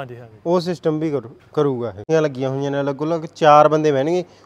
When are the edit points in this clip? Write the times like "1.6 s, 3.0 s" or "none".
2.0 s